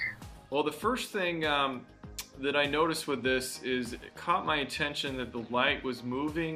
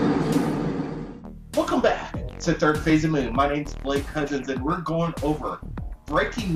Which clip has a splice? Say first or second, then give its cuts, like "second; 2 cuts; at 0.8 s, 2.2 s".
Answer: second; 1 cut; at 4.1 s